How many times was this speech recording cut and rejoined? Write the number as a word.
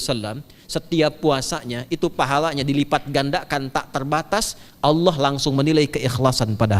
zero